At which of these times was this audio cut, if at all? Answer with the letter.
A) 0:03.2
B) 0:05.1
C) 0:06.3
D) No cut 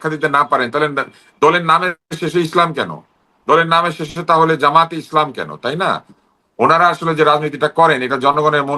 C